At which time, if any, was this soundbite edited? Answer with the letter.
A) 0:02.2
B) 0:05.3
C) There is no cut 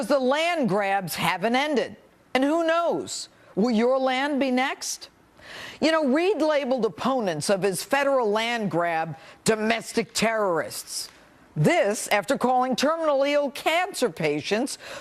A